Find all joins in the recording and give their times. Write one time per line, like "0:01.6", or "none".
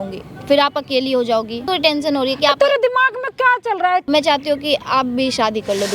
0:01.7
0:04.1